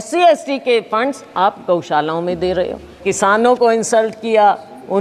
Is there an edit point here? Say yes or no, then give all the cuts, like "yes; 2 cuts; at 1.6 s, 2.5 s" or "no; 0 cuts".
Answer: yes; 1 cut; at 3.0 s